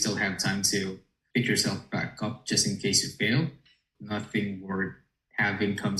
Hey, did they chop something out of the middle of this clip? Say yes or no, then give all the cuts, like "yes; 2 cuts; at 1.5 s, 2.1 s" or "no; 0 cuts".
yes; 1 cut; at 3.9 s